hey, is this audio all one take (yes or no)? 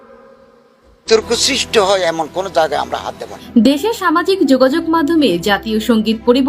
no